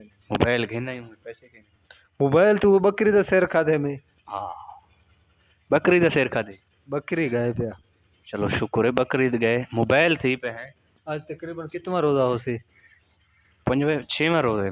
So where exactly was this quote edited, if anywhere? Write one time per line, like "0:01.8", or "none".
none